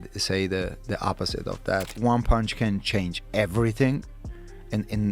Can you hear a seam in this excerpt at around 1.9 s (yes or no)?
yes